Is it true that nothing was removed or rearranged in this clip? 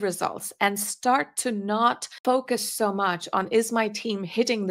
no; 1 cut; at 2.1 s

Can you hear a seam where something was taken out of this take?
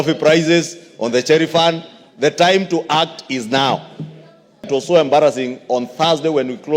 yes; 1 cut; at 4.7 s

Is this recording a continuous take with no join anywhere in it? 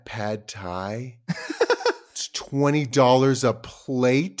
yes; 0 cuts

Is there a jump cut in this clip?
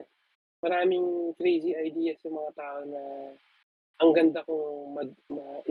no; 0 cuts

